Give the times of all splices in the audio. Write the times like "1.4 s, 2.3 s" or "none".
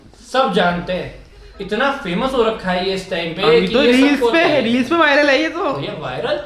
none